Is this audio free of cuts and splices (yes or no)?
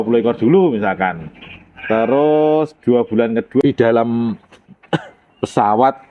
no